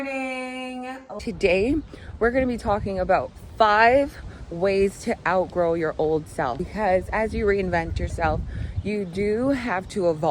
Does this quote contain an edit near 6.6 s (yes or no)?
yes